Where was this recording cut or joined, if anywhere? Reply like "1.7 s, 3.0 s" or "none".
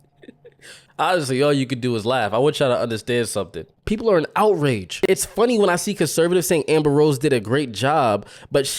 3.7 s, 4.9 s